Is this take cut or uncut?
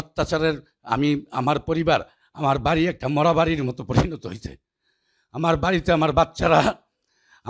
uncut